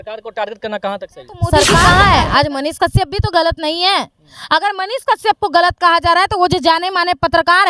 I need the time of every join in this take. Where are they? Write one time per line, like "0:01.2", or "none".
0:01.7

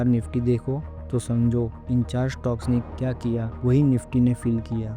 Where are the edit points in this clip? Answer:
0:03.5

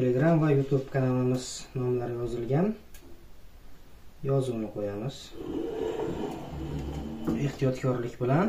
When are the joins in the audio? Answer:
0:05.3

